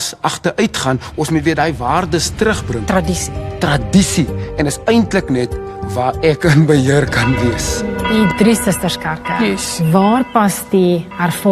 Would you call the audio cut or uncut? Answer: cut